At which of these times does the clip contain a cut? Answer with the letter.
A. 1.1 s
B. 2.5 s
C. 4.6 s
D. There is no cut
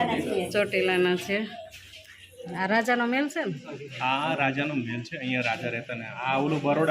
B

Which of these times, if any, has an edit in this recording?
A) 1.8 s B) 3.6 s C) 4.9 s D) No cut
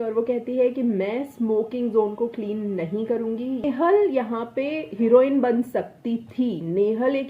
B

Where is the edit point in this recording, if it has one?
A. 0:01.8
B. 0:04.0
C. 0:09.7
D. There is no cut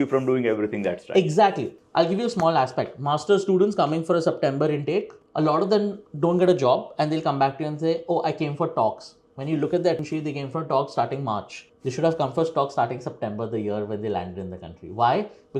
A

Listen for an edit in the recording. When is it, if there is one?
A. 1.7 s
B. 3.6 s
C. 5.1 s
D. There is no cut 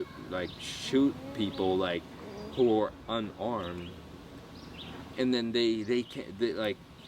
C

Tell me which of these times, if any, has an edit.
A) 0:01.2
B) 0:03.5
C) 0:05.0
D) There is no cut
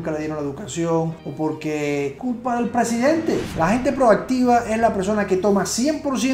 B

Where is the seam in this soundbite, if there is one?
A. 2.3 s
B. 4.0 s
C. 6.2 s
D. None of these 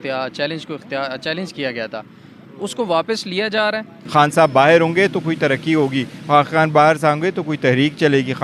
B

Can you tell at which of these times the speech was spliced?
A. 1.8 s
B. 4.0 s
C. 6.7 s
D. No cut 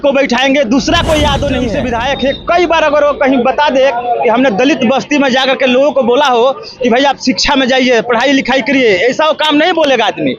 A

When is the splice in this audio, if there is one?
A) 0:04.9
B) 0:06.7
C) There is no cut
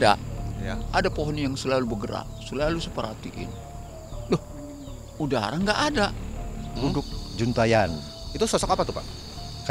B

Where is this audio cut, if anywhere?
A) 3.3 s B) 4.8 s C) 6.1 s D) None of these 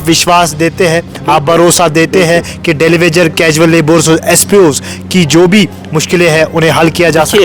D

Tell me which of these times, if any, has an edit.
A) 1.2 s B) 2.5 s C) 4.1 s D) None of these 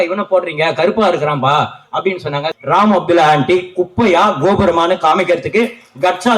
B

